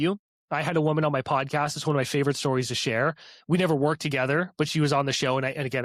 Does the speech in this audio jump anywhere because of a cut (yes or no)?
no